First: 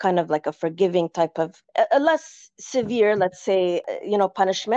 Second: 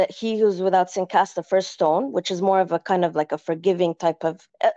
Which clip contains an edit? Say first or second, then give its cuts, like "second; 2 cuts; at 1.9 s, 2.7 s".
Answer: first; 1 cut; at 3.8 s